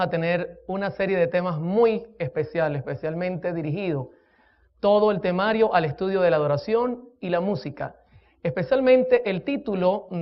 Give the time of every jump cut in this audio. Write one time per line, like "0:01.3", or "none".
0:05.8